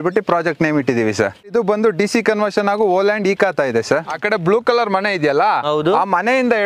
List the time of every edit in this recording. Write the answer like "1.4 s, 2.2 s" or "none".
1.5 s, 4.2 s